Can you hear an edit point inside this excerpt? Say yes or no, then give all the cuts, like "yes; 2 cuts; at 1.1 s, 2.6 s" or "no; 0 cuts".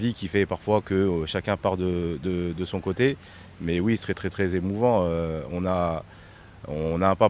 no; 0 cuts